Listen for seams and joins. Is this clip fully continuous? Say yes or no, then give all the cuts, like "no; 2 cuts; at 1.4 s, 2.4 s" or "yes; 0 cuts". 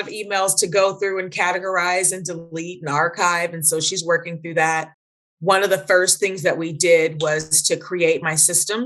yes; 0 cuts